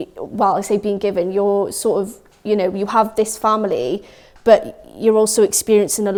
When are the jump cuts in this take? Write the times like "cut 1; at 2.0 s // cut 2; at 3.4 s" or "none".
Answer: none